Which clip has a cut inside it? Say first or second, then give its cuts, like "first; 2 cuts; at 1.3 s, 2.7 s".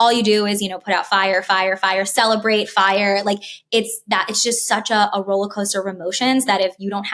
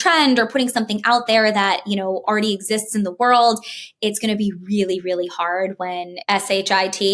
second; 1 cut; at 6.1 s